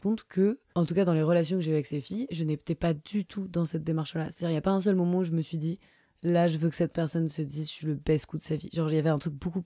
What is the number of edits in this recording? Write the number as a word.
zero